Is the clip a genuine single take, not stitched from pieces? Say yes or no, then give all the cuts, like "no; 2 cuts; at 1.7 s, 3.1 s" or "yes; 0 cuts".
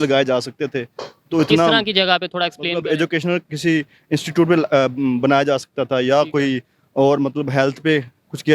yes; 0 cuts